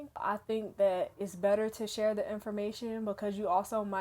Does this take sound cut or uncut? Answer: uncut